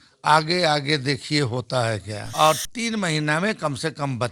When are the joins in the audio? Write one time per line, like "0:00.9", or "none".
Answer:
0:02.2